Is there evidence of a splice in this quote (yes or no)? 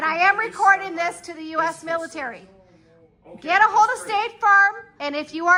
no